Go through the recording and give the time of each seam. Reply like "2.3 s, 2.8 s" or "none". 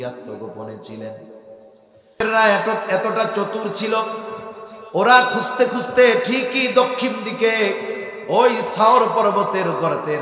2.2 s